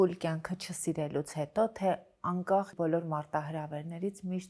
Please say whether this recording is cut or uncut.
cut